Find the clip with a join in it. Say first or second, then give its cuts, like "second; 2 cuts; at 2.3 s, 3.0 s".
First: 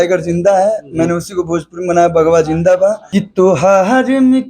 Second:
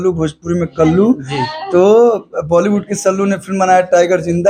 first; 1 cut; at 3.0 s